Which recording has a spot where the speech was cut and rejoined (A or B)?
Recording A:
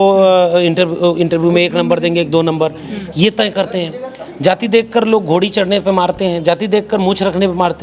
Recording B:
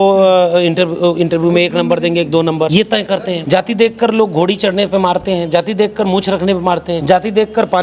B